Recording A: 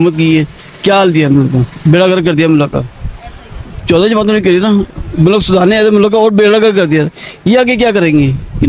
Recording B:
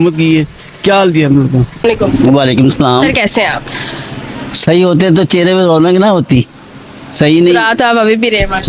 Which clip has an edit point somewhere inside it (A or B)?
B